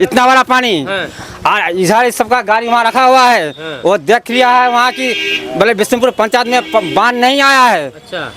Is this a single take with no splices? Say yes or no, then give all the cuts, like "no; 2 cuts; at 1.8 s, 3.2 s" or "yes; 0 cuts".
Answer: yes; 0 cuts